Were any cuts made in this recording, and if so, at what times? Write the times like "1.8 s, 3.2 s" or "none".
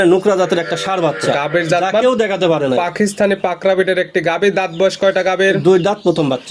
none